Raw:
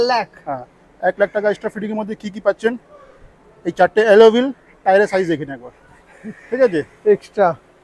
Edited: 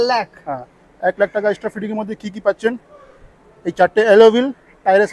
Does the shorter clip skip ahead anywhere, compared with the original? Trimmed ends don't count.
no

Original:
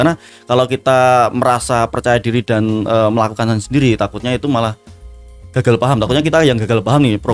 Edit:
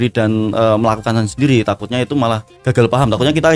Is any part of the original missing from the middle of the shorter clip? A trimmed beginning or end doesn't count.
yes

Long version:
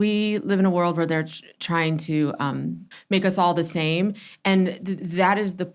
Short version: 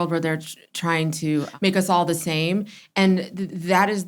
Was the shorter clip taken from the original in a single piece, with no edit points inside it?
no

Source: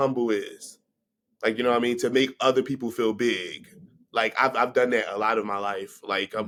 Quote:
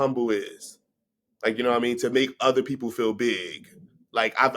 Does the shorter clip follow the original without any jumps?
yes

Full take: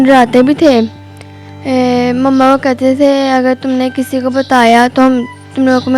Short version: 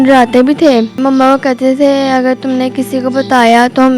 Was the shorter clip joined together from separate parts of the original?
yes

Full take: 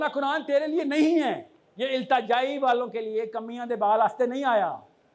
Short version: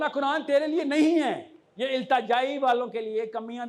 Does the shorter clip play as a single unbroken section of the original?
yes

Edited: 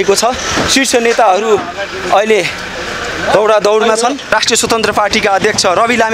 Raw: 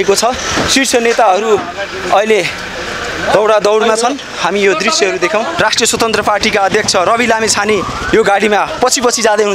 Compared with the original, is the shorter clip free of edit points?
no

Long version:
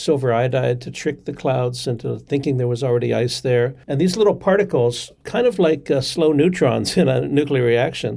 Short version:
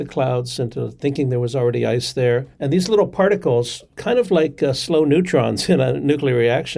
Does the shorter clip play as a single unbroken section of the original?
yes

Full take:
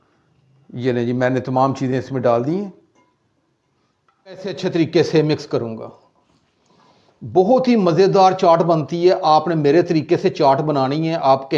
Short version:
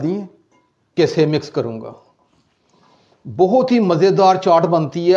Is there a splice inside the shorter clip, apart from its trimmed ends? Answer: yes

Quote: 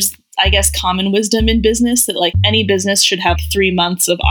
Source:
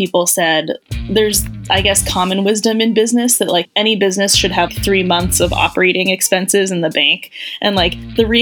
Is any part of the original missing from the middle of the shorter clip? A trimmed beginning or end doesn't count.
no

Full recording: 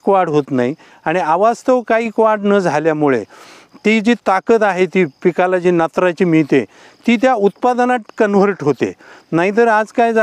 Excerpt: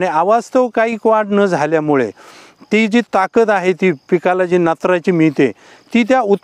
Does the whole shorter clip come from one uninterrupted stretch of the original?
yes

